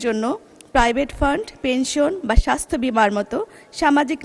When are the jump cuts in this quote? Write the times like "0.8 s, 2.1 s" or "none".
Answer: none